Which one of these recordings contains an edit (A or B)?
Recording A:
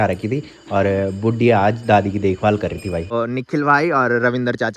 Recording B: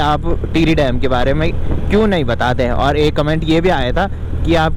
A